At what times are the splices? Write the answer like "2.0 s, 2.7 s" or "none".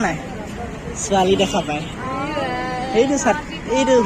none